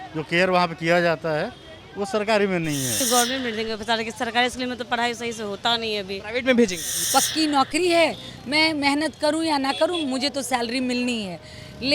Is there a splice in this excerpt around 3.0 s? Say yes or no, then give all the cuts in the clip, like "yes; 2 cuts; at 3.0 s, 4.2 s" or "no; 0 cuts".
yes; 2 cuts; at 3.0 s, 6.9 s